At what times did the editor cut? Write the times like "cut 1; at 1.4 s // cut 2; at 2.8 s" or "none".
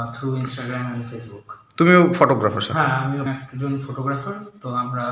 cut 1; at 3.3 s

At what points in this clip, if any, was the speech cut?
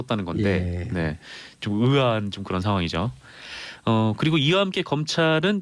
cut 1; at 2.3 s

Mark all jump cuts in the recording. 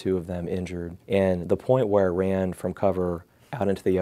cut 1; at 0.9 s

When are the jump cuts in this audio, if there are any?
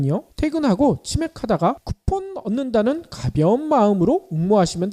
cut 1; at 2.5 s

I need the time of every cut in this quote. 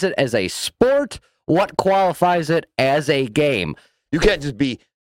cut 1; at 4.0 s

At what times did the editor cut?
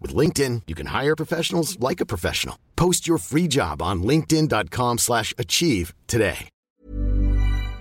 cut 1; at 6.6 s

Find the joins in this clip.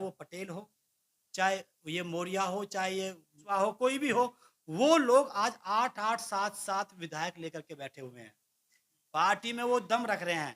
cut 1; at 3.5 s

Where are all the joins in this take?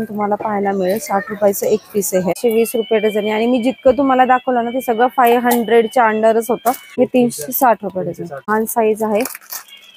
cut 1; at 2.4 s // cut 2; at 6.8 s // cut 3; at 8.5 s

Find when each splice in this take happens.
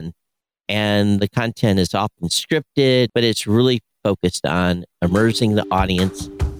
cut 1; at 3.1 s

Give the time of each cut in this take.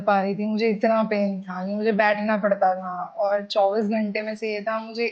none

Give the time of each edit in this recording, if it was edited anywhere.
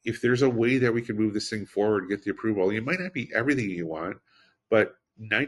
none

